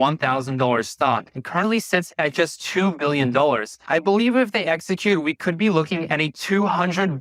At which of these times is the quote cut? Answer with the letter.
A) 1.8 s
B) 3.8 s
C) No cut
C